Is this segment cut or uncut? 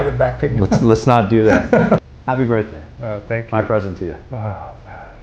cut